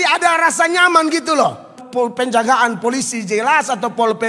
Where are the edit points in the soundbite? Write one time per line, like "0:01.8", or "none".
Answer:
0:01.8

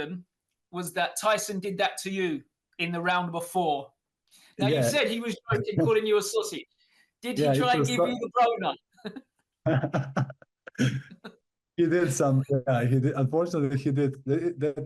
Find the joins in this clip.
none

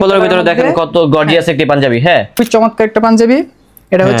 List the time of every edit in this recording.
0:02.4

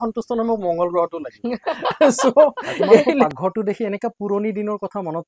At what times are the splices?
0:03.3

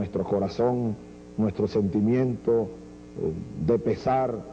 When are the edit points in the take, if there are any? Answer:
0:03.5

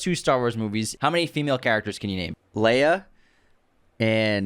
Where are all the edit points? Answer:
0:00.9
0:02.4

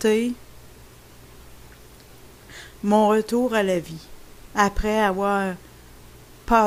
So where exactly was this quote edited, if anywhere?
none

